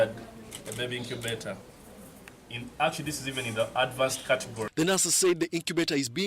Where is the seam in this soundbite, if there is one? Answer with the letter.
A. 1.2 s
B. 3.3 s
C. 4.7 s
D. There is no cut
C